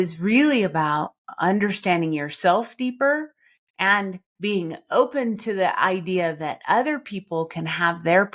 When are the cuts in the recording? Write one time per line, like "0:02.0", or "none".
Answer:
none